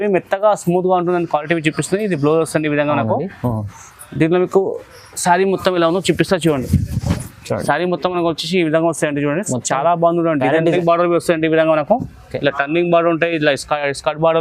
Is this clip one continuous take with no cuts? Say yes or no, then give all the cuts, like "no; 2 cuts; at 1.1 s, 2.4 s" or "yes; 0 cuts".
no; 1 cut; at 10.8 s